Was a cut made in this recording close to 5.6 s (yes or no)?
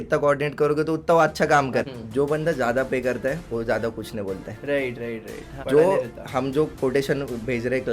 yes